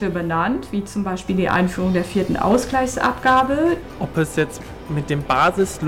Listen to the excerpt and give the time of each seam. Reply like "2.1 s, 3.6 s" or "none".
3.8 s